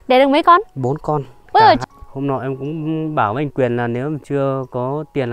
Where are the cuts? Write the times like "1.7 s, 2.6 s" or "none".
1.8 s